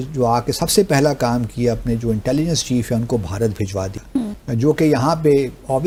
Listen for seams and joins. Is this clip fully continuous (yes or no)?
yes